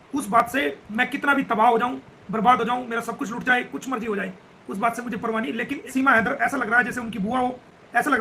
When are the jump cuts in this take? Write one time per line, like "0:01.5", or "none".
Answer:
0:00.8
0:05.8